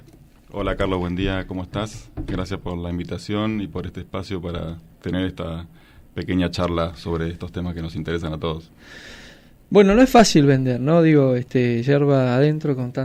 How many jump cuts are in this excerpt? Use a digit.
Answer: 0